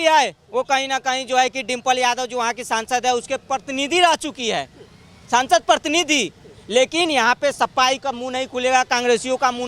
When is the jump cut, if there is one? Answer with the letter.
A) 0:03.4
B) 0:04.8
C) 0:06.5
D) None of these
D